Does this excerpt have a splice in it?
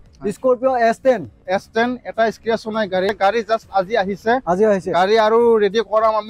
yes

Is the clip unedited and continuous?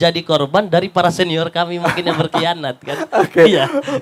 yes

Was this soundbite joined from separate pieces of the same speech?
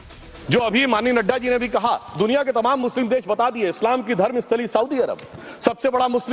yes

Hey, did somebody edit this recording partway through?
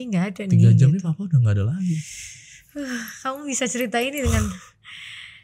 no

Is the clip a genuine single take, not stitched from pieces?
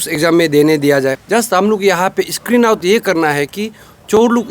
no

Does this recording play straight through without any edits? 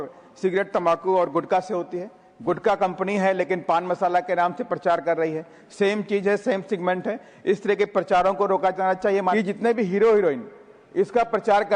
no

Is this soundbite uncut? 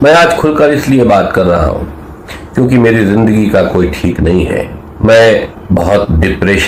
no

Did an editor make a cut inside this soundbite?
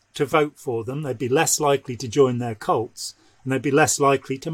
no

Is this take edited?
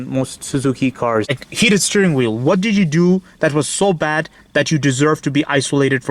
yes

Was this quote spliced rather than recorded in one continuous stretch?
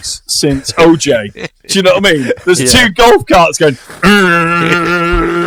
no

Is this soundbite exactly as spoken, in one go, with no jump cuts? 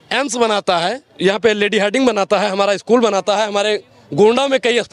no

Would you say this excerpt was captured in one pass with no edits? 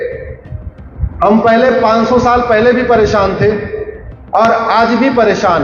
yes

